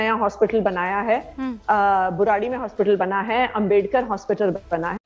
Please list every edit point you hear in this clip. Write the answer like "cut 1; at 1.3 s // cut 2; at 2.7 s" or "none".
none